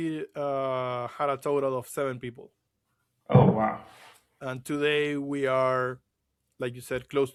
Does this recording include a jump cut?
no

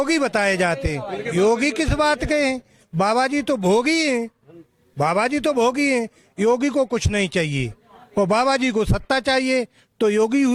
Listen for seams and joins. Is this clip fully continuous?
yes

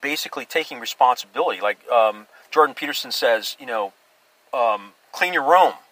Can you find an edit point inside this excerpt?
no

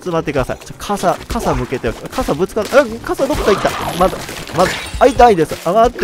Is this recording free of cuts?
yes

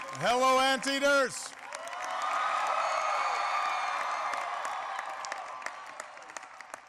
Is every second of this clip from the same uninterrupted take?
yes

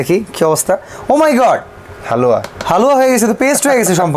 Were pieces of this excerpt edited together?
no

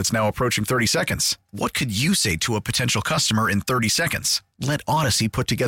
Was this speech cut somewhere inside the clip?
no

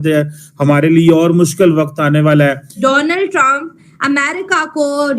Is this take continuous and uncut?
no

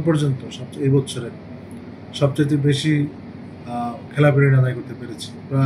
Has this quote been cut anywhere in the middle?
no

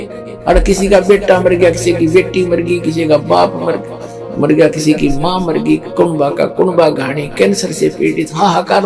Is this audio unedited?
yes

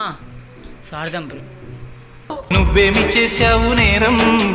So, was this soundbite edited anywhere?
no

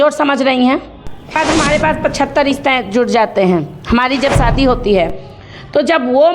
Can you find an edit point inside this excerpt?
yes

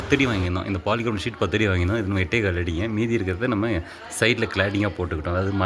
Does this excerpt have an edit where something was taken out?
no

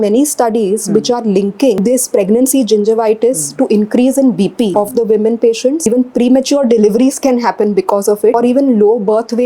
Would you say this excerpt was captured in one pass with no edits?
no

